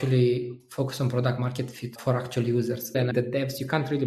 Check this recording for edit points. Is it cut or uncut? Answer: cut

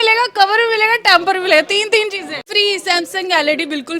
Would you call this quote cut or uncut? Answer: cut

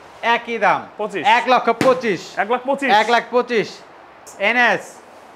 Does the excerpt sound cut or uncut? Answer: cut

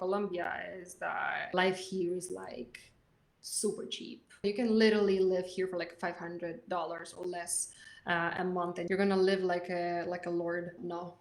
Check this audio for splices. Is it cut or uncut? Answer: cut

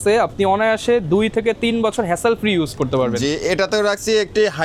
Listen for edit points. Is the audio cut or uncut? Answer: uncut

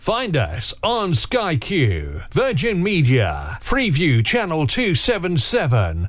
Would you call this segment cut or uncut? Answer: uncut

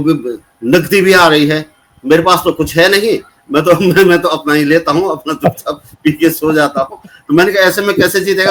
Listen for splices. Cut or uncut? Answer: uncut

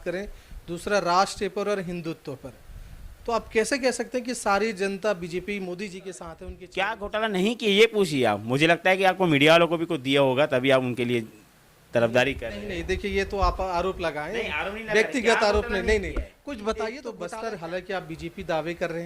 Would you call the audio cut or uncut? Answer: cut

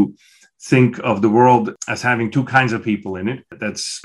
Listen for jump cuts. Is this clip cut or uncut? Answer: cut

